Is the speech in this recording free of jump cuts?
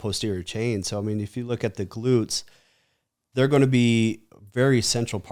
yes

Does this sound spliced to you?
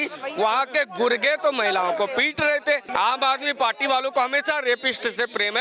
yes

